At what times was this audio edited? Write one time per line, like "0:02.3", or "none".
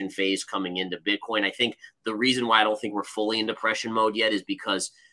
none